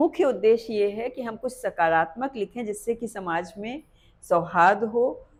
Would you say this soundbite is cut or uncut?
uncut